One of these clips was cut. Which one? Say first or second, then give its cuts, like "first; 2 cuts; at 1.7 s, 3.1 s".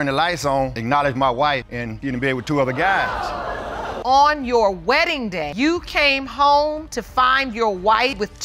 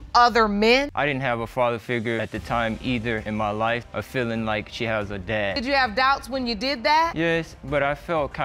second; 4 cuts; at 0.9 s, 2.2 s, 3.9 s, 5.6 s